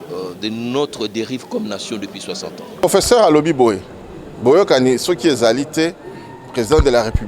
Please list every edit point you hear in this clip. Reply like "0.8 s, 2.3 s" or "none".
2.8 s